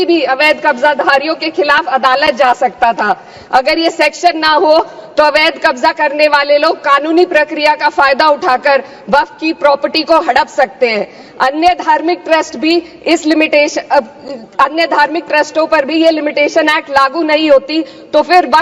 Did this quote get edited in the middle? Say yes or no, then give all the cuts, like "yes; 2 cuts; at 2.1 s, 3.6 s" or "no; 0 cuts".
no; 0 cuts